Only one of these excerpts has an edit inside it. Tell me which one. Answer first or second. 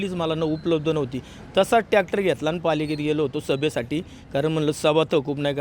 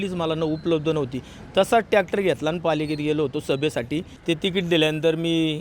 second